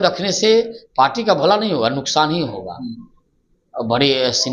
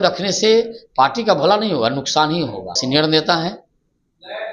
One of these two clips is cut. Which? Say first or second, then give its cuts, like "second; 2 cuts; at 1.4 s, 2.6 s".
second; 1 cut; at 2.8 s